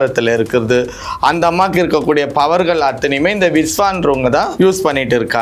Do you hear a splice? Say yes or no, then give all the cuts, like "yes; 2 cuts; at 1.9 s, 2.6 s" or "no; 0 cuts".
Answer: yes; 1 cut; at 4.5 s